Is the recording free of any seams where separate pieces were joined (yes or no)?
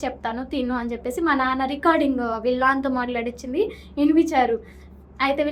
yes